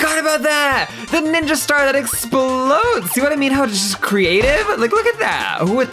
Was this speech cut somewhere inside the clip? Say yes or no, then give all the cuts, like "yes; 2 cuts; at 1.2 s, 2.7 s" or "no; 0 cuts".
no; 0 cuts